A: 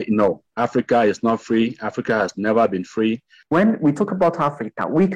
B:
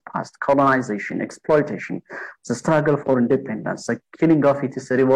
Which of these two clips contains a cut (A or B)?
A